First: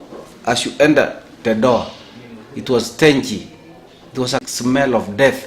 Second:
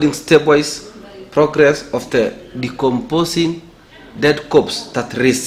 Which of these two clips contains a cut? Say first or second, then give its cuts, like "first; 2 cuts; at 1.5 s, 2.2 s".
first; 1 cut; at 4.4 s